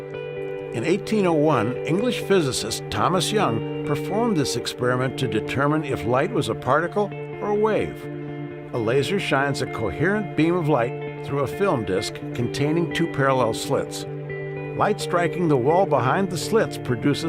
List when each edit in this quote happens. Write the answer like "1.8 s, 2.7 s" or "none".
6.3 s